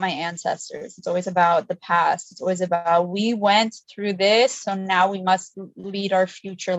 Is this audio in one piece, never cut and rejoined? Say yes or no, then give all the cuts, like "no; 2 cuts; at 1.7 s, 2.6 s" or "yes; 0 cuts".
yes; 0 cuts